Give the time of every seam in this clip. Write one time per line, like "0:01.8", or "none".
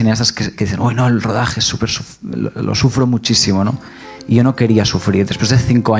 none